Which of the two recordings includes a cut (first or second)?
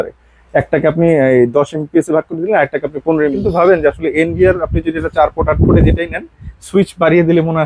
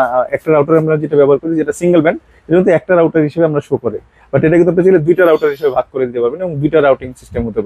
first